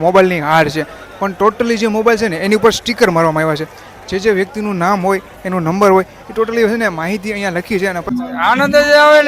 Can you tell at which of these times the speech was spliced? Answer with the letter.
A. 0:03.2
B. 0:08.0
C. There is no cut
B